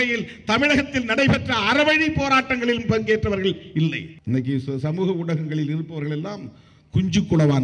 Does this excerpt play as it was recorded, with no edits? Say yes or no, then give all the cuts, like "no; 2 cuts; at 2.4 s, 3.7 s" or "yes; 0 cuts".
no; 1 cut; at 4.1 s